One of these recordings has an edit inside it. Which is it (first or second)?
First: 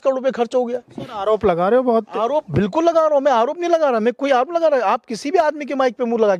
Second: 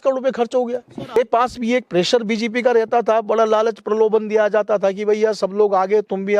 second